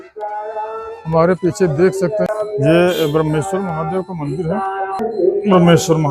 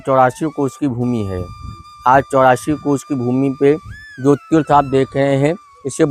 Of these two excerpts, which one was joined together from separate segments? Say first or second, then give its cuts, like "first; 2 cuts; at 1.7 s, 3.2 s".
first; 2 cuts; at 2.3 s, 5.0 s